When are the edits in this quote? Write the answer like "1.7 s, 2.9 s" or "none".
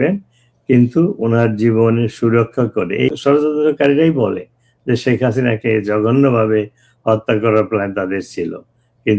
3.1 s